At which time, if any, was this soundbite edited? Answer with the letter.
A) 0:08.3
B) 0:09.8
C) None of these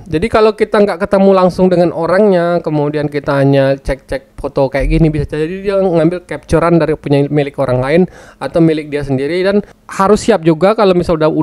B